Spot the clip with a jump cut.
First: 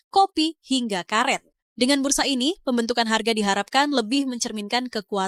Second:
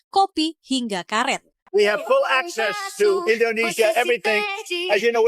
second; 1 cut; at 1.6 s

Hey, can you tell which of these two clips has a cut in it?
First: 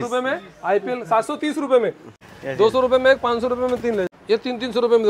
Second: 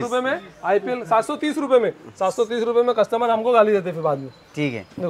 first; 2 cuts; at 2.2 s, 4.1 s

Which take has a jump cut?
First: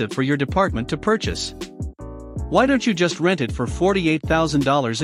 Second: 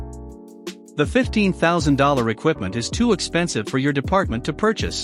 second; 1 cut; at 0.9 s

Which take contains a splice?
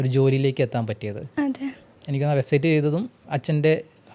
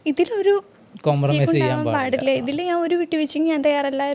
first; 2 cuts; at 1.9 s, 3.2 s

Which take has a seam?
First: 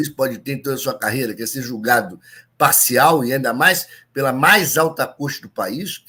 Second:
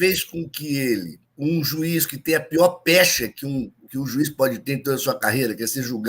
second; 1 cut; at 1.2 s

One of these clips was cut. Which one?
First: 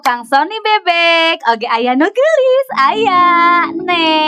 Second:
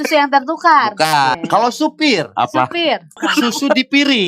second; 2 cuts; at 1.4 s, 3.2 s

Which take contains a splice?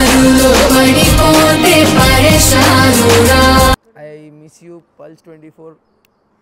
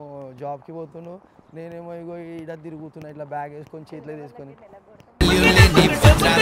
first; 1 cut; at 3.9 s

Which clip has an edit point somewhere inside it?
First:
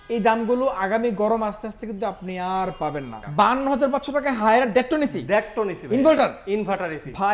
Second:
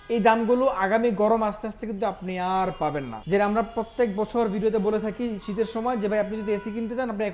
first; 1 cut; at 3.1 s

